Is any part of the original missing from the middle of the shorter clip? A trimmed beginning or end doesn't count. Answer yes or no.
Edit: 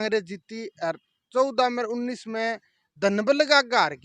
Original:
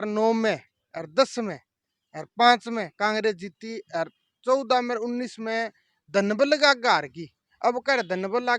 no